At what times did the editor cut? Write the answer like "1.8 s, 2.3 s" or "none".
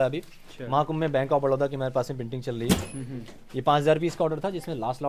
none

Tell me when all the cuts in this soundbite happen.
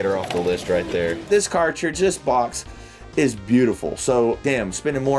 none

